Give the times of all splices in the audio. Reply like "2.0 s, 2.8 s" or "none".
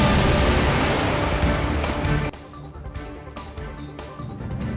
none